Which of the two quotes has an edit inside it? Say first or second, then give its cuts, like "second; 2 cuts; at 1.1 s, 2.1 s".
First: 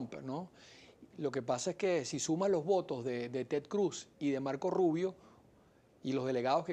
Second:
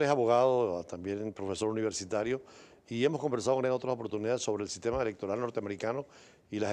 first; 1 cut; at 4.0 s